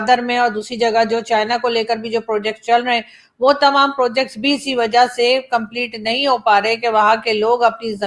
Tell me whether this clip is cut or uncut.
uncut